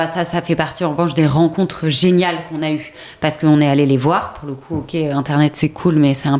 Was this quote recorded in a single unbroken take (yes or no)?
yes